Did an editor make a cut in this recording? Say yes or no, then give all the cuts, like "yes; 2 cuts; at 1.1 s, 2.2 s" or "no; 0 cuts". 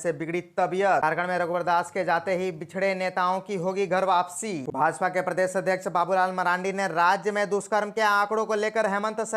yes; 2 cuts; at 1.0 s, 4.7 s